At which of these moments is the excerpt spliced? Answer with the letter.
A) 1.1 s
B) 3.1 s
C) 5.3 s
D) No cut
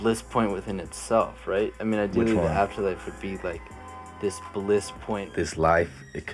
C